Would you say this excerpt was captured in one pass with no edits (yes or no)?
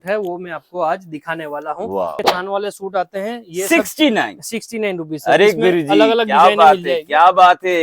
no